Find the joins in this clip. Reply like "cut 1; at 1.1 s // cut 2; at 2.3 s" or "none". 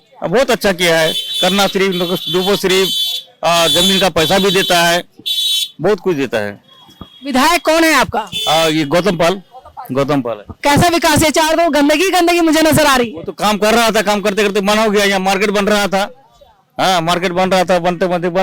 none